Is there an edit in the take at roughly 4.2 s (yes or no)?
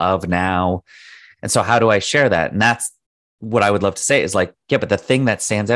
no